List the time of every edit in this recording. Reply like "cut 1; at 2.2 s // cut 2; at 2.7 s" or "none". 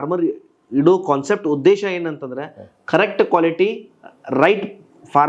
none